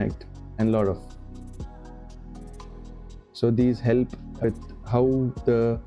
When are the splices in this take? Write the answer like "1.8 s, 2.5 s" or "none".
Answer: 4.4 s